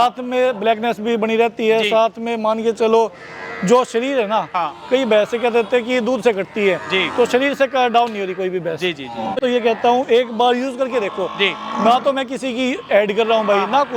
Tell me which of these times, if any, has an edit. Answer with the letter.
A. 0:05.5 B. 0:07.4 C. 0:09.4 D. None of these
C